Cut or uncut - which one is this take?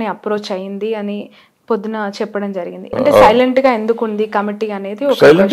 cut